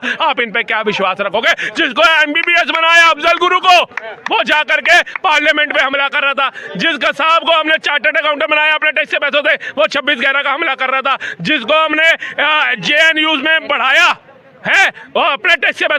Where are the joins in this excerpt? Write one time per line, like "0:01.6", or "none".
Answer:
none